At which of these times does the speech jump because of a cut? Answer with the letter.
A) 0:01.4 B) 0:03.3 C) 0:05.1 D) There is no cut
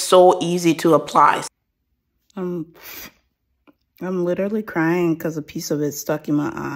A